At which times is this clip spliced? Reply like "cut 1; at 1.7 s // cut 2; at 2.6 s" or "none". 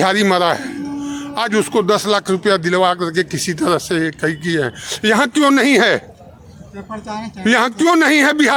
none